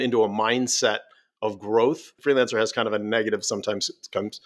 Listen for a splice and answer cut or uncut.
cut